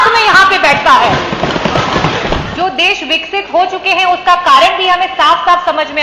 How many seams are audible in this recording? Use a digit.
1